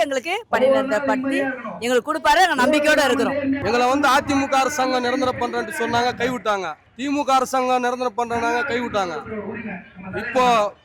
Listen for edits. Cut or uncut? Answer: cut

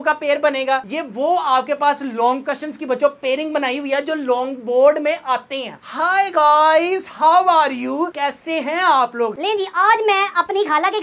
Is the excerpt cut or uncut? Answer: cut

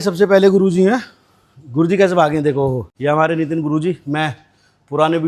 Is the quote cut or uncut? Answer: uncut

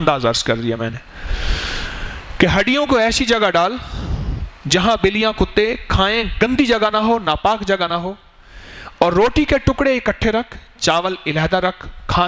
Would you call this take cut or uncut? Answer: uncut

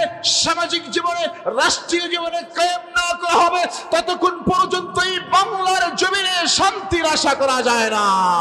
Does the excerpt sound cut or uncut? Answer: uncut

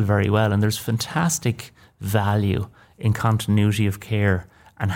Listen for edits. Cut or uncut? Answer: uncut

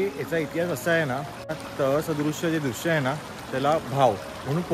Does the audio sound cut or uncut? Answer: cut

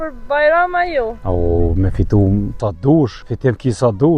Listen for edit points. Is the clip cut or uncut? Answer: cut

